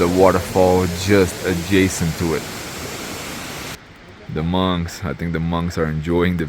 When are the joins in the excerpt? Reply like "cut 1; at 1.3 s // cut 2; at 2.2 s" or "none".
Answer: cut 1; at 3.8 s